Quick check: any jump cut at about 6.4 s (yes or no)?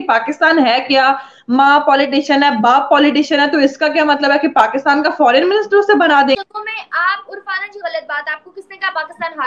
yes